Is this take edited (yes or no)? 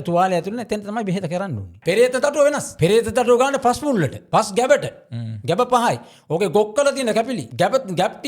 yes